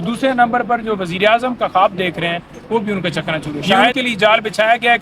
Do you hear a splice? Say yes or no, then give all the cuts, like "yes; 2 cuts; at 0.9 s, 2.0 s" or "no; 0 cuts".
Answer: yes; 1 cut; at 4.0 s